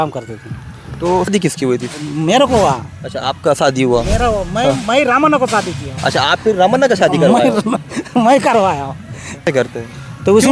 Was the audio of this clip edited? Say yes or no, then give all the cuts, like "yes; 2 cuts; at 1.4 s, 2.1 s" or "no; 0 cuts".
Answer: yes; 2 cuts; at 1.3 s, 9.5 s